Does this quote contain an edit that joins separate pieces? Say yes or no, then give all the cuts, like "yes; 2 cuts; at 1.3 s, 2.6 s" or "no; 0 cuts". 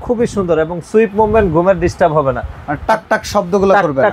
no; 0 cuts